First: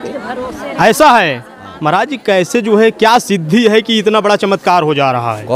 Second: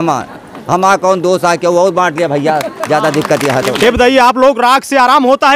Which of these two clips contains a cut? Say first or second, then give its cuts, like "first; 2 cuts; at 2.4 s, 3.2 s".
second; 1 cut; at 3.8 s